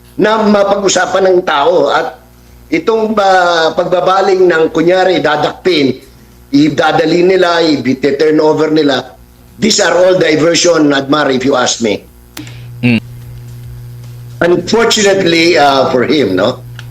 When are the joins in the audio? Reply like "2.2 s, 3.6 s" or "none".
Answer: 13.0 s